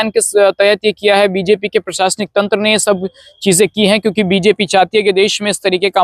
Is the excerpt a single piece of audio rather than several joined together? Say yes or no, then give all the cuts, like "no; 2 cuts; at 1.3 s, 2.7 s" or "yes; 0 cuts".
yes; 0 cuts